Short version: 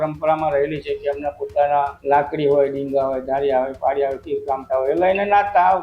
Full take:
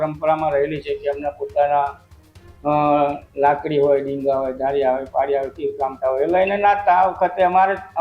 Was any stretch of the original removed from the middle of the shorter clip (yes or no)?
yes